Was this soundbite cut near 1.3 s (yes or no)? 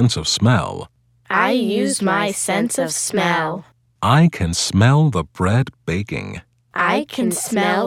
no